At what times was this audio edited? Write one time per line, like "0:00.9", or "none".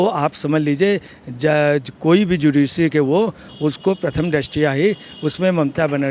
none

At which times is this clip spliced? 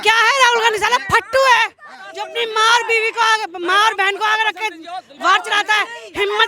none

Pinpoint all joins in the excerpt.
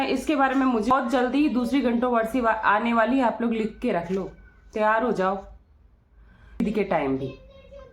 0:00.9
0:06.6

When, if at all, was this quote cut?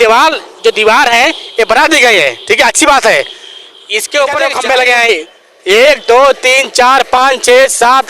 0:04.5

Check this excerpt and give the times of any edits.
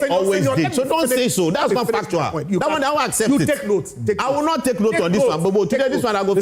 none

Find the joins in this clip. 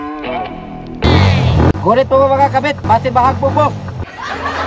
0:01.0

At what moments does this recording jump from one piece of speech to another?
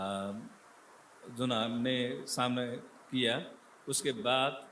none

